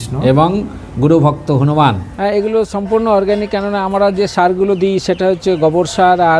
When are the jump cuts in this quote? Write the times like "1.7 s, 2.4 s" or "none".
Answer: 2.1 s